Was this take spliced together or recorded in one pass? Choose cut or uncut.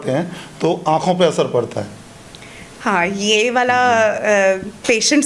uncut